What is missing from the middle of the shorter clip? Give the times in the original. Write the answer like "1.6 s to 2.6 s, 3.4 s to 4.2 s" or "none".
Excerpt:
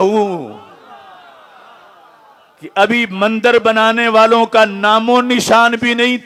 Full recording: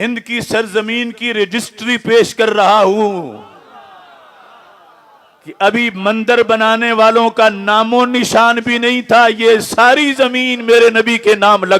none